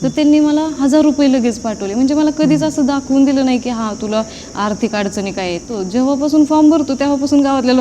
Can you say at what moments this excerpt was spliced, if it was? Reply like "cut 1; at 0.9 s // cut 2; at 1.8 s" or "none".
cut 1; at 5.8 s